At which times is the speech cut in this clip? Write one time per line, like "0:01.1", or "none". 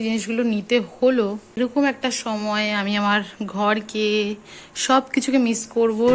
0:01.6